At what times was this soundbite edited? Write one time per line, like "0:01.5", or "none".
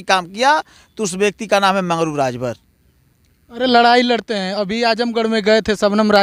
none